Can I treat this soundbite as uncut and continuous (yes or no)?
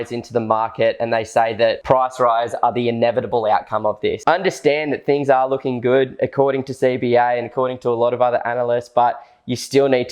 no